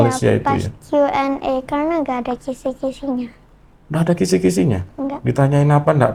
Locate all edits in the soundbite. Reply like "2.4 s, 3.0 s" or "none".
none